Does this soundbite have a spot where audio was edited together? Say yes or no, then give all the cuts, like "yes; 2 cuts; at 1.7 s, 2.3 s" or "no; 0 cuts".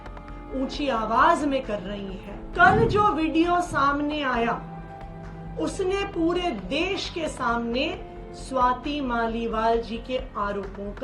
yes; 1 cut; at 2.5 s